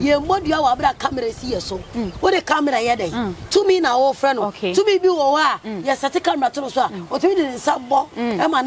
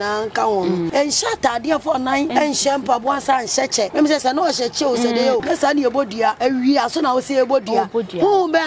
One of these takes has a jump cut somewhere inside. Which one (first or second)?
second